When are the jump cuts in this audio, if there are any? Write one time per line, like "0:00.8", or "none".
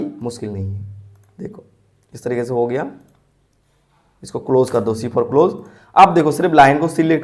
none